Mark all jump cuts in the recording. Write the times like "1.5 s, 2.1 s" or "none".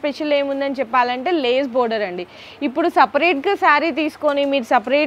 none